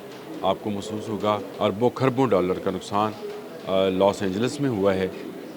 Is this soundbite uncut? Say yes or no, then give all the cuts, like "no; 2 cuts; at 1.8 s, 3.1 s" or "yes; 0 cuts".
no; 1 cut; at 1.5 s